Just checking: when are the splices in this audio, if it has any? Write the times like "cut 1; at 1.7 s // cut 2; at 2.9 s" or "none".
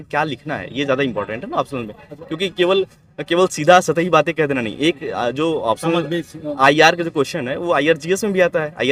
none